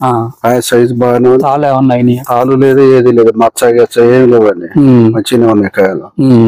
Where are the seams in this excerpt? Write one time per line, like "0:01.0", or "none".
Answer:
none